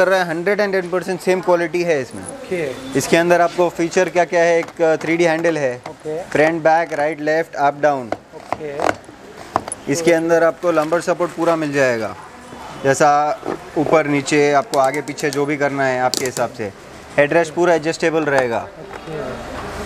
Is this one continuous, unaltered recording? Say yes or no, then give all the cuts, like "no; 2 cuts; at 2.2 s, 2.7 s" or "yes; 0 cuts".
yes; 0 cuts